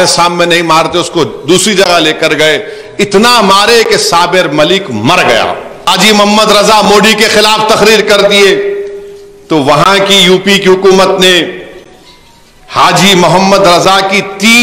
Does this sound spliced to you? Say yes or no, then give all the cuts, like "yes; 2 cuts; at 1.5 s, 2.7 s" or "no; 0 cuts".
yes; 1 cut; at 5.9 s